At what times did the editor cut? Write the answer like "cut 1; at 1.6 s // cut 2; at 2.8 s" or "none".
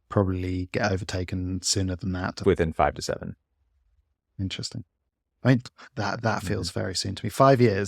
cut 1; at 2.4 s